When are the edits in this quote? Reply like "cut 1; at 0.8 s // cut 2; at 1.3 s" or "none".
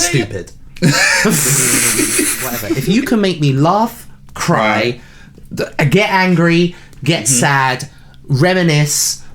cut 1; at 2.8 s